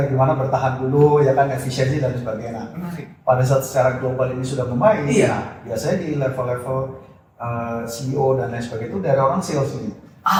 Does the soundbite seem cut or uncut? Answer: uncut